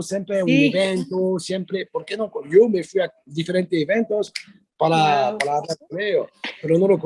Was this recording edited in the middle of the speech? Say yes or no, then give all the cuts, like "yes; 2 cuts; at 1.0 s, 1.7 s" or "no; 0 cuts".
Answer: no; 0 cuts